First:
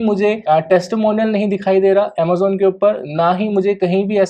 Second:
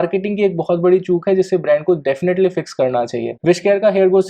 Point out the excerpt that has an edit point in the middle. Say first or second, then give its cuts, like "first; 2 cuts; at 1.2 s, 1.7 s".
second; 1 cut; at 3.3 s